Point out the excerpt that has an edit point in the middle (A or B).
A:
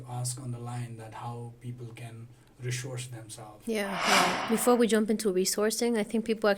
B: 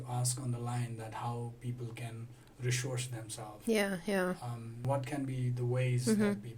A